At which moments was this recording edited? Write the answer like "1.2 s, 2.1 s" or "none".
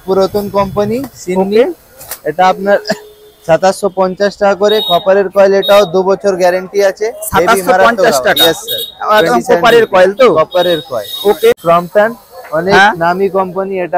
11.6 s